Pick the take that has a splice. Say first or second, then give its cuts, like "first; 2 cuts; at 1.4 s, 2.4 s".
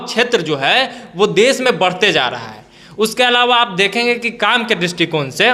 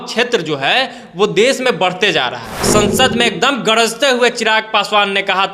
second; 1 cut; at 2.6 s